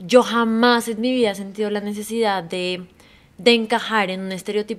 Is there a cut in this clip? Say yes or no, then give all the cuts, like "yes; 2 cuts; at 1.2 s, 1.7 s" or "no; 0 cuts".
no; 0 cuts